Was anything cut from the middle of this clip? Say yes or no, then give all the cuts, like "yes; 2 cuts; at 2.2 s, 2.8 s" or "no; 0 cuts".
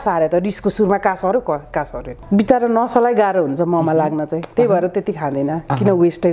yes; 1 cut; at 2.1 s